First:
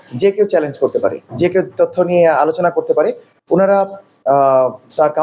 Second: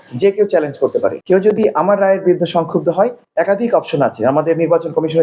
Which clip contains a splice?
second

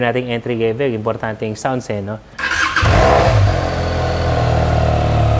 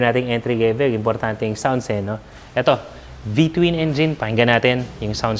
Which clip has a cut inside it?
first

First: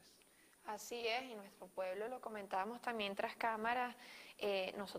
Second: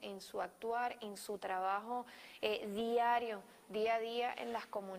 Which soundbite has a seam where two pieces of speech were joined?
first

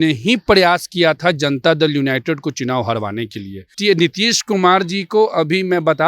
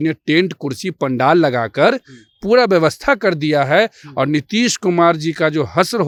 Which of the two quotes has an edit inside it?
first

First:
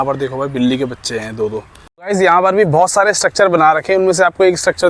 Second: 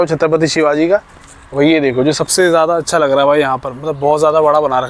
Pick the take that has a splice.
first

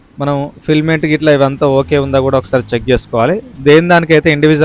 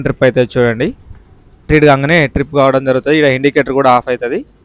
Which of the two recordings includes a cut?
second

